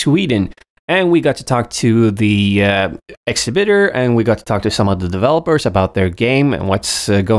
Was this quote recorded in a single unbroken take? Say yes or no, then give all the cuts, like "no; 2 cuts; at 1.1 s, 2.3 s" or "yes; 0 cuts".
yes; 0 cuts